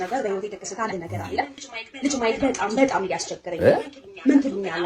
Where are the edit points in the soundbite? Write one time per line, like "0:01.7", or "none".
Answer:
0:01.6